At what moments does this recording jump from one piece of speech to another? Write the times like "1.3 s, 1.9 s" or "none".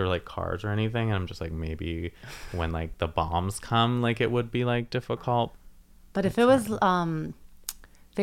5.5 s